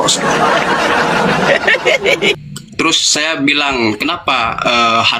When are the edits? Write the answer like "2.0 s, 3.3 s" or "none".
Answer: 2.4 s